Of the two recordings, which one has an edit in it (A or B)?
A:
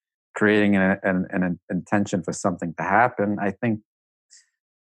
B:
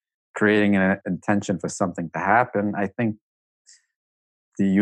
B